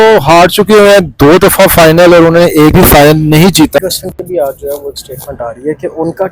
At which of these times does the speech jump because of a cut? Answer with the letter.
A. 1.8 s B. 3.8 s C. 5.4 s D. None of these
B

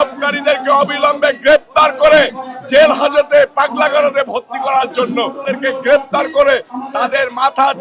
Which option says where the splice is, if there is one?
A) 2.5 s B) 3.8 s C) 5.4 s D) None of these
C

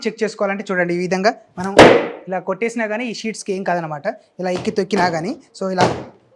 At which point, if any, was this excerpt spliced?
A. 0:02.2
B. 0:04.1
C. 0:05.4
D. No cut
D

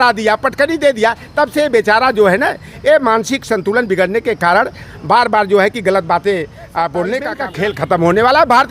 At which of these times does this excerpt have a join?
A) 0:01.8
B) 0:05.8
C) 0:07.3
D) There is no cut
C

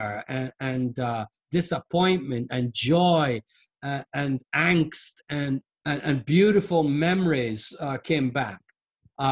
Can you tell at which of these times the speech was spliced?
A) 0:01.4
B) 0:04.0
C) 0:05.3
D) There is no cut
D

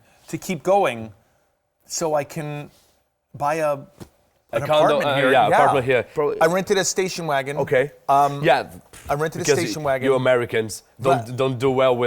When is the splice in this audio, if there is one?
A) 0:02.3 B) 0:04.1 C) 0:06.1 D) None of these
C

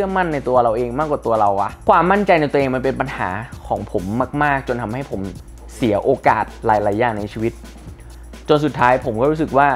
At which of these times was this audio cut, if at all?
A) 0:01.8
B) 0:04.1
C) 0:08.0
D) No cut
A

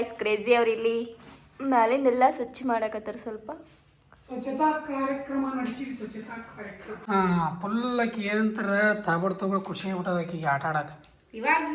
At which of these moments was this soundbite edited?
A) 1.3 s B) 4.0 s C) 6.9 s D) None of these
C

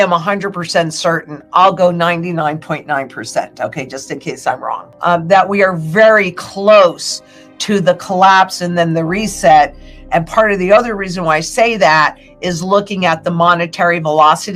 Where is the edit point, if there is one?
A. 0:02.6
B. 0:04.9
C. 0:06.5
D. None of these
B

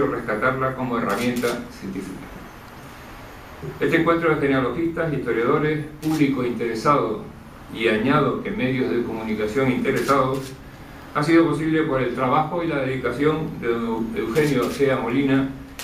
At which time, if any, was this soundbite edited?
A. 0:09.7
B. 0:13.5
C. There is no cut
A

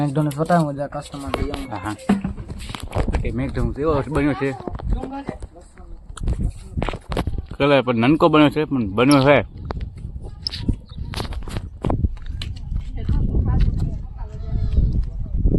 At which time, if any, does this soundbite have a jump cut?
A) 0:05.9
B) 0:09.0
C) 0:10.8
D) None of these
D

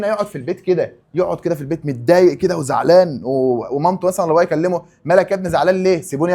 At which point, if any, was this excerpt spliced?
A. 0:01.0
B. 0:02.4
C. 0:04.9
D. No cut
A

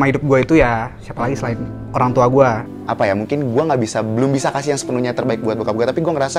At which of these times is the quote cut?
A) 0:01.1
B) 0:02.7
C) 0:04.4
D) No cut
B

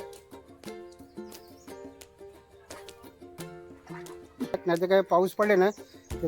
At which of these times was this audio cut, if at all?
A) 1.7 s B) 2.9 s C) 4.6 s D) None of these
C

